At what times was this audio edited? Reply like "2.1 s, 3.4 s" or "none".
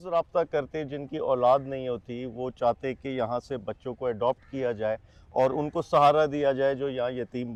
none